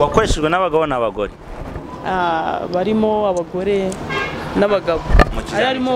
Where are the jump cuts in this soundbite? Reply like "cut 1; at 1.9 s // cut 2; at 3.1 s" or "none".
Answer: none